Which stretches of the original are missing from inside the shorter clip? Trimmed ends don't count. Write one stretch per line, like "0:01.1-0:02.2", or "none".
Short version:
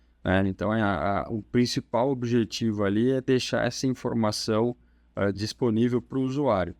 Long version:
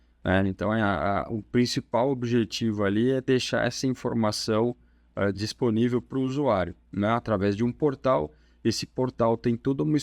none